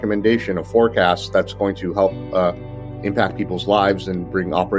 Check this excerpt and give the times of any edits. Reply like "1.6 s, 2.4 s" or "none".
none